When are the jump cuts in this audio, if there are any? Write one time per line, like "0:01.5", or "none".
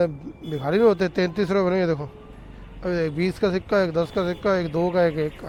none

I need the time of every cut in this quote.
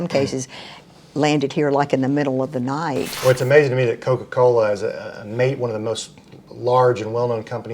0:03.1

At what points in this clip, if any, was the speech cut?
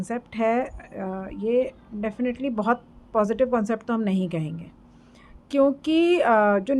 none

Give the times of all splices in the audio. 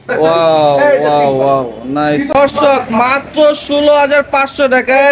0:02.3

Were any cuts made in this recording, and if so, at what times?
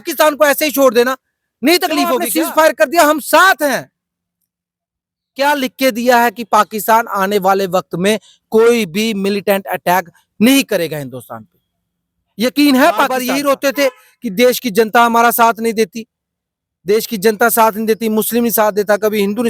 0:02.2
0:13.2

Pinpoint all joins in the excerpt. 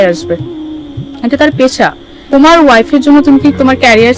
0:02.2

